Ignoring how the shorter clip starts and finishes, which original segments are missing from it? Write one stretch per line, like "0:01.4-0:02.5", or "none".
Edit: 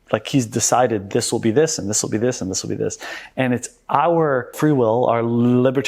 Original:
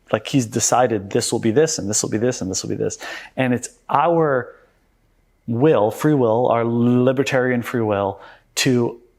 0:04.5-0:06.0